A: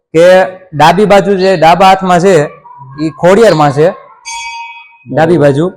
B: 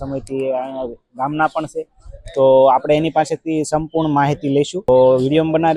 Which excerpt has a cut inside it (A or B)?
B